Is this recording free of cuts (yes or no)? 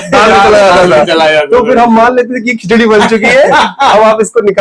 yes